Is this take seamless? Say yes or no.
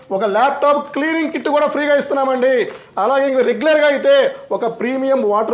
yes